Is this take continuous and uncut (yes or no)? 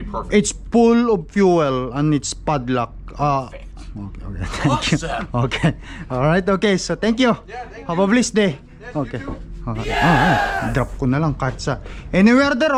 yes